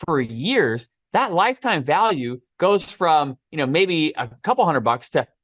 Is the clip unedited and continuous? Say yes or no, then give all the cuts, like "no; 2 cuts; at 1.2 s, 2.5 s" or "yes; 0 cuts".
no; 1 cut; at 4.4 s